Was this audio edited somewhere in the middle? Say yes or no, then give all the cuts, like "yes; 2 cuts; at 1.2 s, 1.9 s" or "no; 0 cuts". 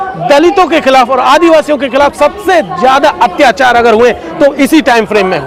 no; 0 cuts